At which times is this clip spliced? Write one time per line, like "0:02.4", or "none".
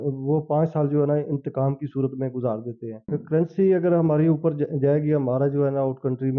0:03.0